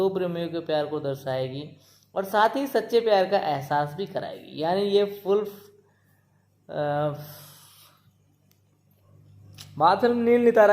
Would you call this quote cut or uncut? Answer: cut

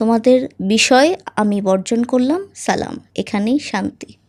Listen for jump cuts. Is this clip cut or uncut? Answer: uncut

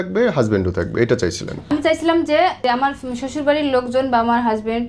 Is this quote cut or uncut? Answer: cut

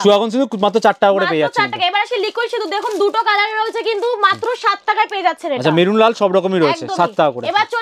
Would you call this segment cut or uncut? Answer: uncut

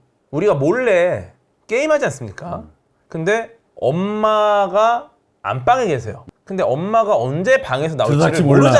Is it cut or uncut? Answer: uncut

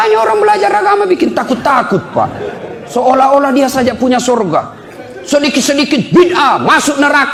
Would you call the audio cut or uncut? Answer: uncut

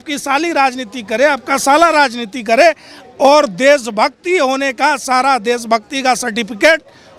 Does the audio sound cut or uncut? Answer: uncut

